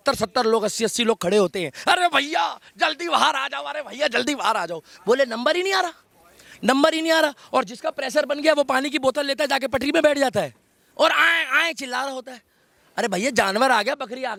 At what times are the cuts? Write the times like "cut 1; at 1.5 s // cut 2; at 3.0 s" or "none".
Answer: none